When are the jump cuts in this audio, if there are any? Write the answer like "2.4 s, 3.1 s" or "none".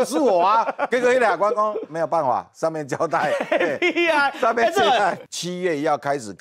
5.2 s